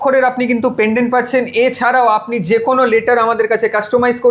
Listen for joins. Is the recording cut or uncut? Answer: uncut